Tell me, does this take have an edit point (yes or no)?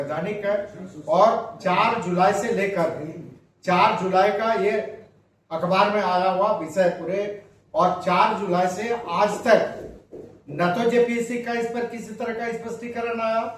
no